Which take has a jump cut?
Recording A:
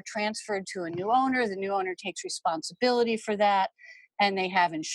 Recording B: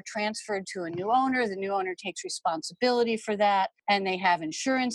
B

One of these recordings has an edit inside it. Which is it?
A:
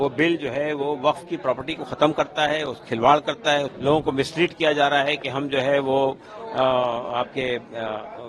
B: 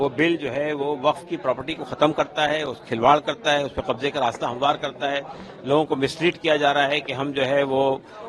A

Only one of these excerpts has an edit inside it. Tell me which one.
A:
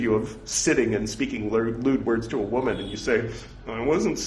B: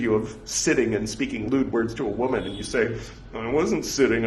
B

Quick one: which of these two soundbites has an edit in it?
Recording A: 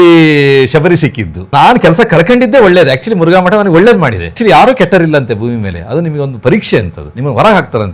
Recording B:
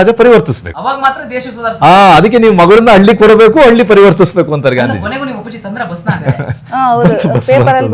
A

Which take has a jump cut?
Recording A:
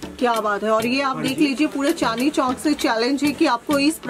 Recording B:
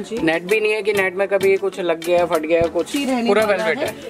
B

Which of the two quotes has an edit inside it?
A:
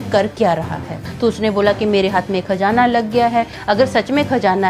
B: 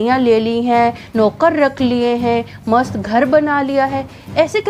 A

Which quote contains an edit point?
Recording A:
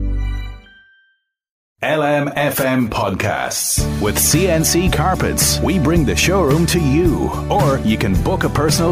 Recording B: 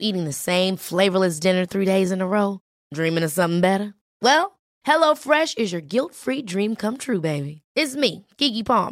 A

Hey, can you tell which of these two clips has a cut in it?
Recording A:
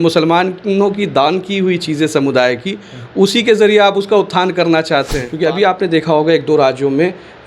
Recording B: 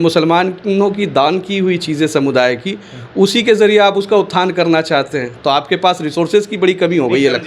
A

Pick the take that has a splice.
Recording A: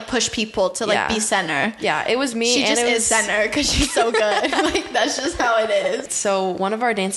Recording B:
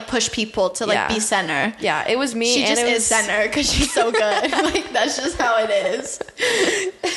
A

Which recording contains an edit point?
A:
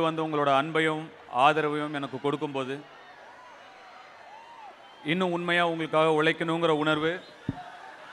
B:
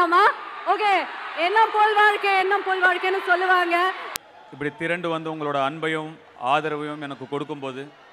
B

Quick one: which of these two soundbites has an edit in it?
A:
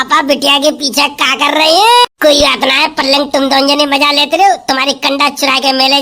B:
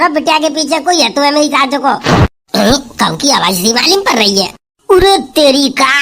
A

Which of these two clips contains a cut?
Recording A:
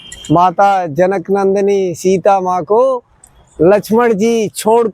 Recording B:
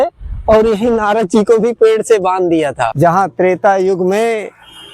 B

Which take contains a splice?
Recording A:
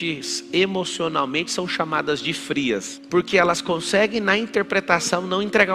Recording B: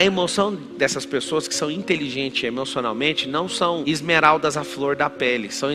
A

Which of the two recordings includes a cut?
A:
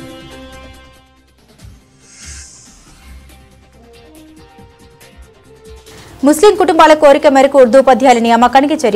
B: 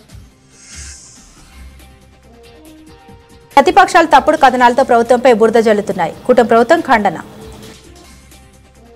B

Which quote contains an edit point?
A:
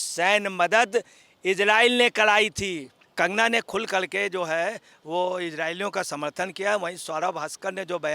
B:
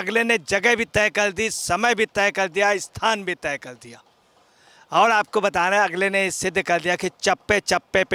A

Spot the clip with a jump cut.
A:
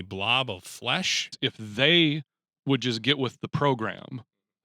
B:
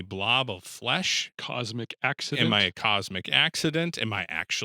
A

